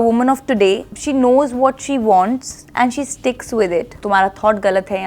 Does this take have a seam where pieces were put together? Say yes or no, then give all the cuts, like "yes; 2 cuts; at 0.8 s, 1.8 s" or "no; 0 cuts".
yes; 1 cut; at 4.0 s